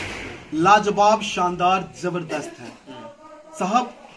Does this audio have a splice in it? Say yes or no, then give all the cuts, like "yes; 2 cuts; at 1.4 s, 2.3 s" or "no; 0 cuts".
no; 0 cuts